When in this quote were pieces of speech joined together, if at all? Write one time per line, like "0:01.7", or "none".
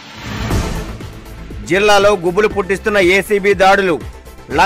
0:01.4